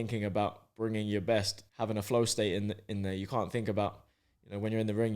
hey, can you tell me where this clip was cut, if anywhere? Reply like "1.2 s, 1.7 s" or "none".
1.6 s